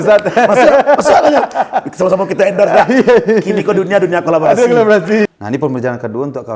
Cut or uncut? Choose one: cut